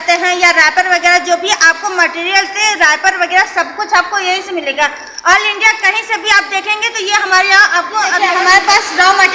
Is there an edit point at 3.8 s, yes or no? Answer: no